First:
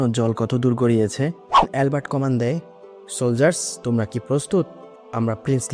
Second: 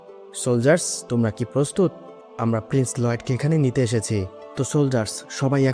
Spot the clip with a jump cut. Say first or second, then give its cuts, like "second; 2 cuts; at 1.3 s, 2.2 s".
first; 1 cut; at 1.7 s